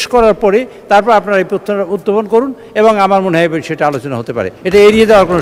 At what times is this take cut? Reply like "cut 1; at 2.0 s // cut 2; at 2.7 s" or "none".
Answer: none